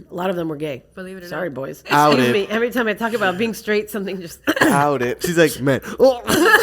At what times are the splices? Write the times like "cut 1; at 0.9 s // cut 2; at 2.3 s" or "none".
cut 1; at 1.8 s // cut 2; at 5.2 s